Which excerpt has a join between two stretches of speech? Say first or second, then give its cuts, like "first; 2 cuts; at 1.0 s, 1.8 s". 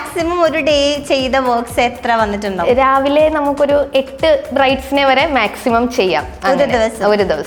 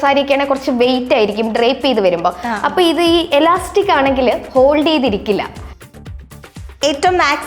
second; 1 cut; at 6.2 s